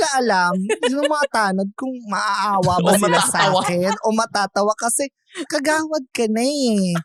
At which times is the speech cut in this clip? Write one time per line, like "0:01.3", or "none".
none